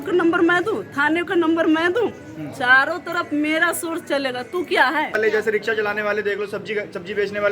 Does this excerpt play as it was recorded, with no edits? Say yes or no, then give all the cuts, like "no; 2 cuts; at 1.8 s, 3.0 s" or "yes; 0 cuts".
no; 1 cut; at 5.2 s